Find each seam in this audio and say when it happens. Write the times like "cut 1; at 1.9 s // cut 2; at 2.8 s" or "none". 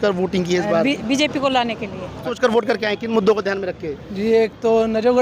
cut 1; at 2.2 s